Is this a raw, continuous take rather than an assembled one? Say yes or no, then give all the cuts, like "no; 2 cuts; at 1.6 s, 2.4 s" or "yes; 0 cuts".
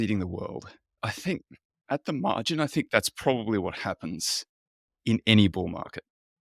no; 1 cut; at 1.0 s